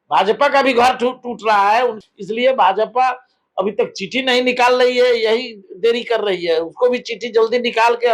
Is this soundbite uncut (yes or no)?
no